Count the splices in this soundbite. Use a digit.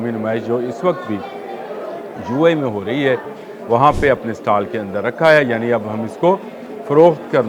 0